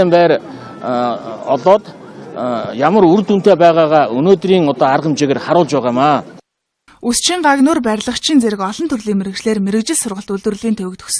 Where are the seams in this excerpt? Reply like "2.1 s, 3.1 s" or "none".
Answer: none